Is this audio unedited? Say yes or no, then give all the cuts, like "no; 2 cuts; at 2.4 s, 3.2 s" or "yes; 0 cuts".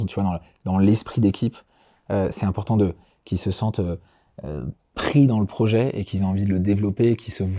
yes; 0 cuts